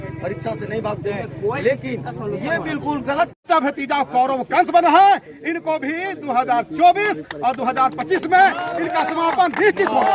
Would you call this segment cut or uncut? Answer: cut